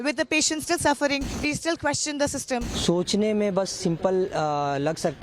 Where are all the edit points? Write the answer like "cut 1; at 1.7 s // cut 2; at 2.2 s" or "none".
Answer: cut 1; at 1.3 s // cut 2; at 2.7 s